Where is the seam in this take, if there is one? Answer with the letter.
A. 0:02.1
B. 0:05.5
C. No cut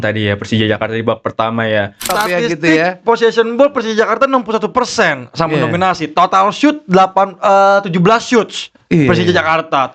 A